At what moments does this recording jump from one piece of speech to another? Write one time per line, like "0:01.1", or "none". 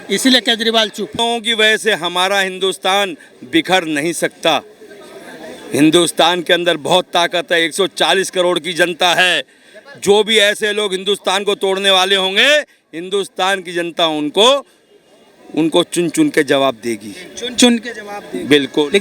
0:01.2